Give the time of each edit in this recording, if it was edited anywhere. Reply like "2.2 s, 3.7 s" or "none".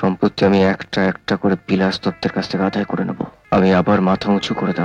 3.4 s

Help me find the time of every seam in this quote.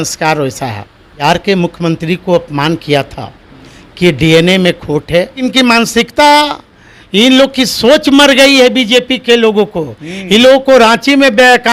1.2 s, 5.4 s

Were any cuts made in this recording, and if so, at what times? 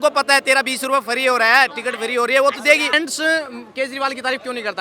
2.9 s

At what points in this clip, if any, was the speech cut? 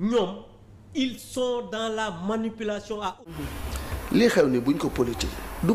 3.2 s

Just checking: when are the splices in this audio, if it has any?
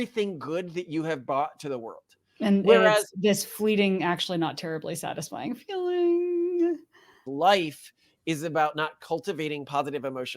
7.3 s

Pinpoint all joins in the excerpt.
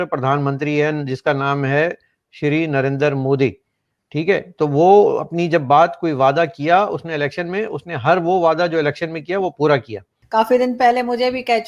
10.2 s

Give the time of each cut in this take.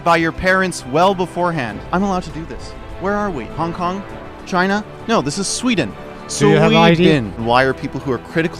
1.8 s, 7.4 s

